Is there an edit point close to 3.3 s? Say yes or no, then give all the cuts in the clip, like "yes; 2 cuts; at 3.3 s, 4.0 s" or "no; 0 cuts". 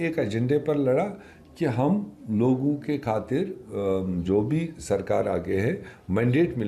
no; 0 cuts